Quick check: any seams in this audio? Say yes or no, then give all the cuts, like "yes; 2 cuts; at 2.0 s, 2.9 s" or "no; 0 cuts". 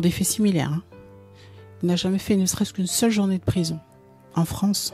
no; 0 cuts